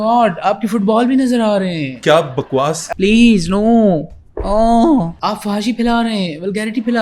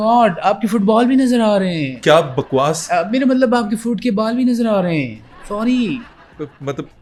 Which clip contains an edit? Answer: first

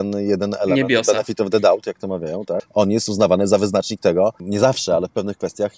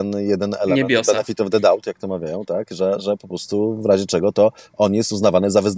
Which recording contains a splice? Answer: first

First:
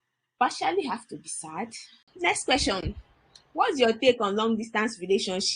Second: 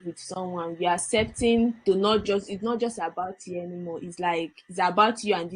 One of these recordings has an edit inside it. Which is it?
first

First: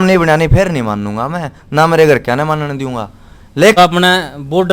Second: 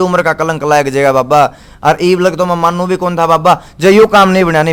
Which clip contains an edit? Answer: first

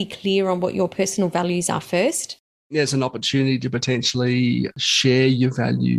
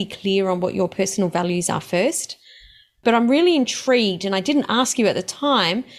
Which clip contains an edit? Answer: first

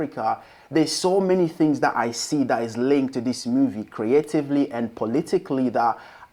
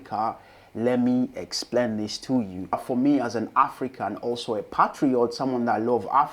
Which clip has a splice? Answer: second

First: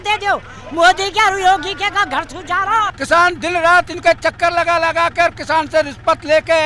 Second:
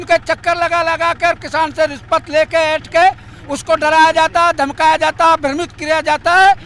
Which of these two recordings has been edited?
first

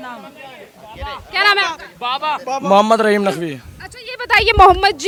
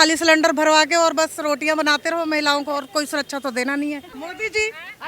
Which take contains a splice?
second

